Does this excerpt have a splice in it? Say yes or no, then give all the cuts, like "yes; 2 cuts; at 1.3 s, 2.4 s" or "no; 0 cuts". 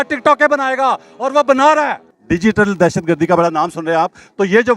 yes; 1 cut; at 2.1 s